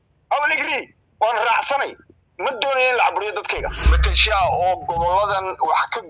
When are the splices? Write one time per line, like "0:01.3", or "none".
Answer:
0:03.8

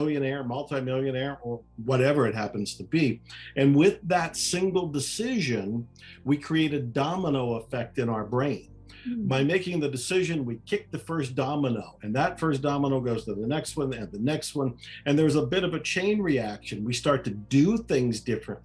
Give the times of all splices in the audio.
none

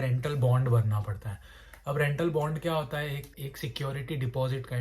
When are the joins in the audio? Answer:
0:03.4

